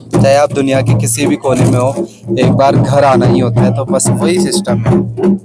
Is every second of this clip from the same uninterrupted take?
yes; 0 cuts

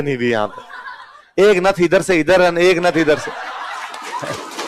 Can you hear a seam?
no; 0 cuts

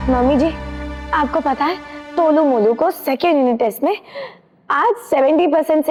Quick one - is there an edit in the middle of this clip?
no; 0 cuts

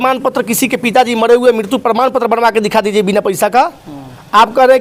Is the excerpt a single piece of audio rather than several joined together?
yes; 0 cuts

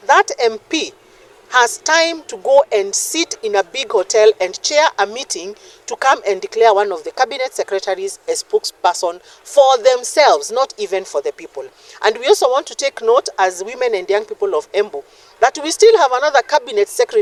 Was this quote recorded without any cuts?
yes; 0 cuts

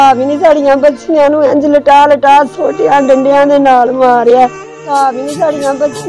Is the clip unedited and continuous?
no; 1 cut; at 4.8 s

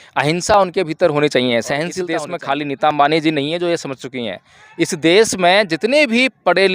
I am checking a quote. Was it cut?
yes; 1 cut; at 1.9 s

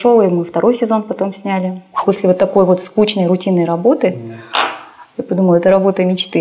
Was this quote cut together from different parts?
yes; 1 cut; at 1.9 s

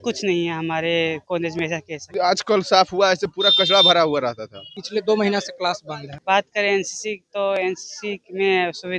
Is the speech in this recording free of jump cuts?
no; 3 cuts; at 2.1 s, 4.8 s, 6.2 s

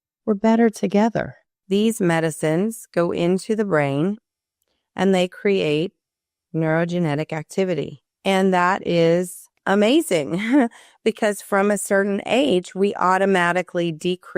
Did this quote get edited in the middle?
yes; 1 cut; at 1.6 s

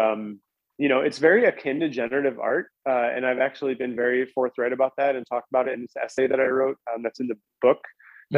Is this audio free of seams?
yes; 0 cuts

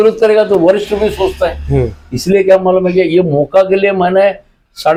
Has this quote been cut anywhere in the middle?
no; 0 cuts

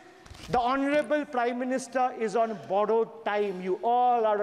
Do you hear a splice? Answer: no; 0 cuts

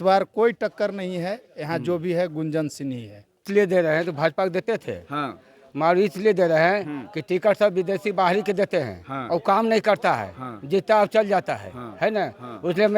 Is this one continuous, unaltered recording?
no; 1 cut; at 3.5 s

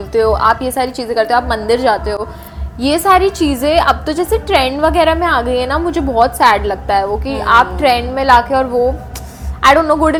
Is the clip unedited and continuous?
yes; 0 cuts

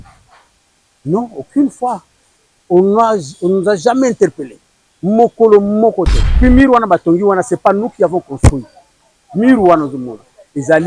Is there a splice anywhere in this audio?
yes; 1 cut; at 6.4 s

